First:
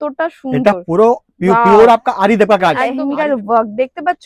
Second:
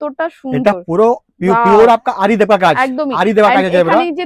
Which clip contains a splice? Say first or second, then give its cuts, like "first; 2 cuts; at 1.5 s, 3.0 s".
first; 1 cut; at 3.0 s